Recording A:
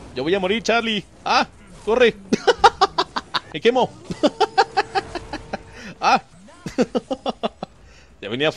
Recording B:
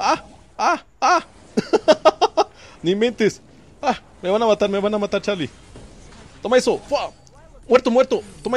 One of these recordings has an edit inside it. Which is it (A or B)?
A